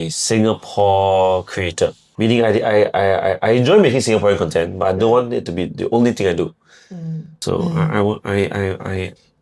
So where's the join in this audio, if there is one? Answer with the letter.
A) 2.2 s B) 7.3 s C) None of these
B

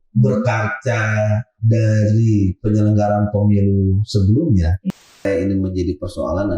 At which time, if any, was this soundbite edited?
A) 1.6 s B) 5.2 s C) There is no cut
B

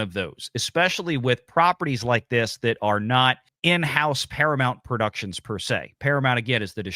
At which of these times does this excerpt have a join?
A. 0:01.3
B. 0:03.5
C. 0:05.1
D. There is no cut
B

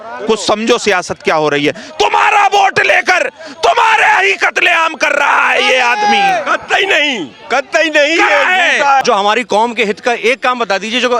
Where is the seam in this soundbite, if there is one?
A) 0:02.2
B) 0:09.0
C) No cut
B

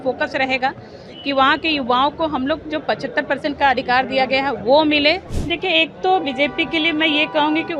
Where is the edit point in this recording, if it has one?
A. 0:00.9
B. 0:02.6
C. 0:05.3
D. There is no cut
C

